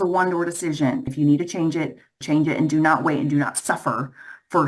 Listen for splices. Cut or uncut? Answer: cut